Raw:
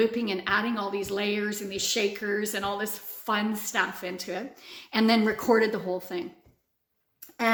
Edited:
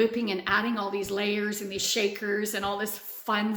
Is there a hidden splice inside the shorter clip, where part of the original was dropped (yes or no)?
no